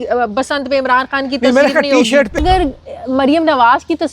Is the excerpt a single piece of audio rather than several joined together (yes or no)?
no